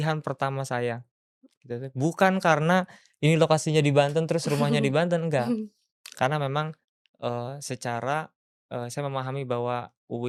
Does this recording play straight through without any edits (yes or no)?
yes